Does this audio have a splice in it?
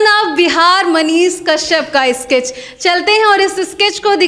no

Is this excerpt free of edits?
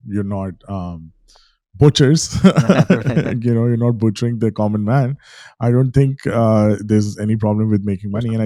yes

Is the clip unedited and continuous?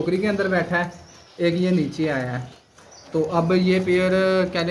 yes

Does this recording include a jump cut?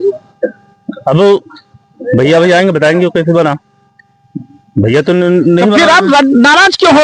no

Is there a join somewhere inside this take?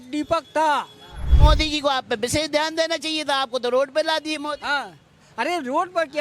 yes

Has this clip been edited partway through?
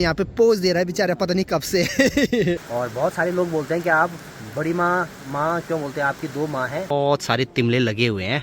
yes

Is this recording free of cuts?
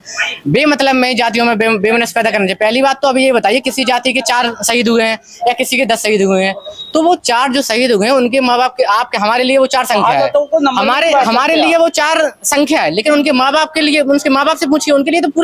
yes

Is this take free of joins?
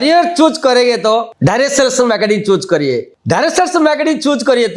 no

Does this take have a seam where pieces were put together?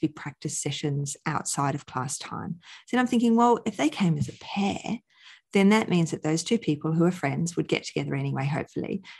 no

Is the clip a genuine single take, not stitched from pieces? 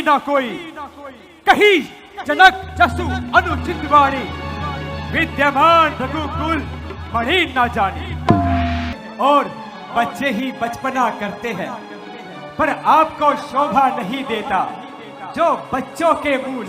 no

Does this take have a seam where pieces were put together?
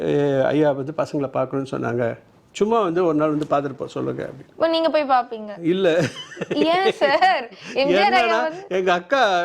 no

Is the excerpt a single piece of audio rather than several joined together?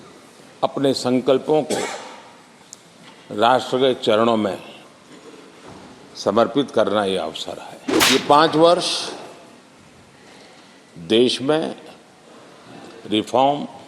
no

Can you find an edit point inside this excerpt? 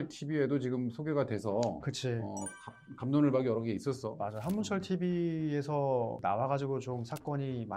no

